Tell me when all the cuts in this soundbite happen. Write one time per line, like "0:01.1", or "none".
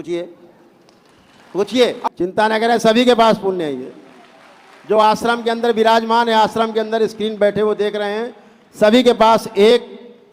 0:02.0